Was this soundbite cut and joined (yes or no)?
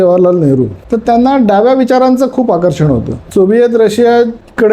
yes